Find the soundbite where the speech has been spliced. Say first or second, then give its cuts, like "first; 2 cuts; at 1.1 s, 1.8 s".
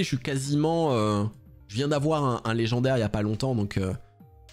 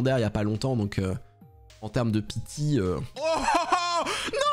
second; 1 cut; at 3.1 s